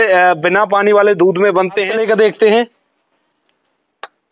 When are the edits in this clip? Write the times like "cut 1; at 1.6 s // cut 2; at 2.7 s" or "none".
cut 1; at 2.0 s

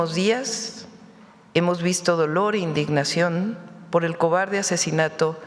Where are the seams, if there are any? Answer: none

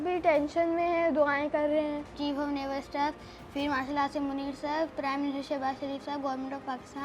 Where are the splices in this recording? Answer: cut 1; at 2.0 s

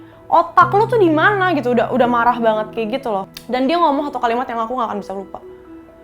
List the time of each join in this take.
cut 1; at 3.3 s

